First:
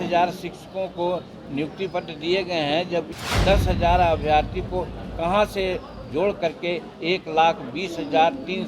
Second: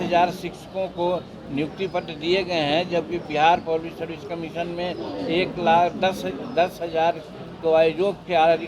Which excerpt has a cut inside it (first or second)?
first